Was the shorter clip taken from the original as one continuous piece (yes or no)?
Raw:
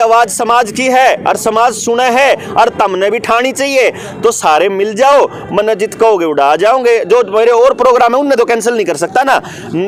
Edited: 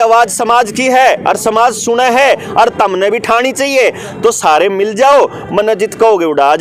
yes